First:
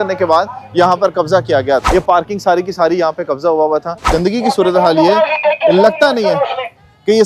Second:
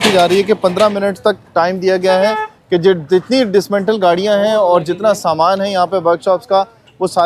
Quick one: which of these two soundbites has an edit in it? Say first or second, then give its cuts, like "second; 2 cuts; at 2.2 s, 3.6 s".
first; 2 cuts; at 1.9 s, 4.1 s